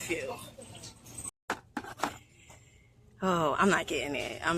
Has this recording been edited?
yes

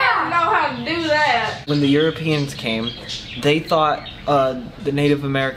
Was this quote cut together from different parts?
yes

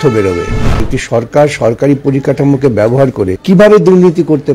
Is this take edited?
yes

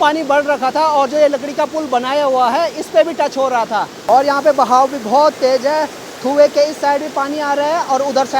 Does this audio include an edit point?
no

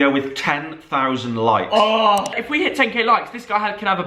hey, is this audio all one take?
no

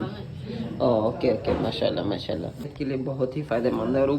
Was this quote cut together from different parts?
yes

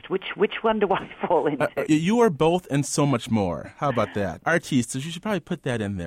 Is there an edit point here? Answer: yes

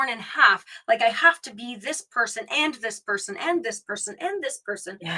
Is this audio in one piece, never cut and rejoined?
yes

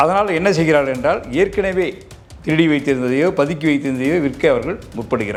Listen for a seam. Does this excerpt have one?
no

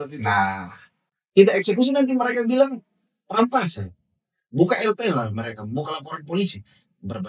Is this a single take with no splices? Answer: no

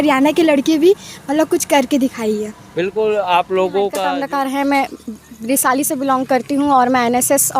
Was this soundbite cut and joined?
yes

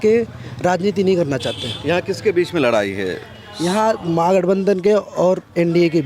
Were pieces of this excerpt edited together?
no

